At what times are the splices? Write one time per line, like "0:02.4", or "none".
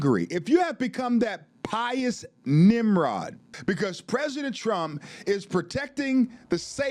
0:03.5